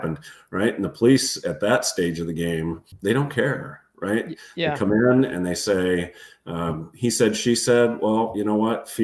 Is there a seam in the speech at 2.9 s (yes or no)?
yes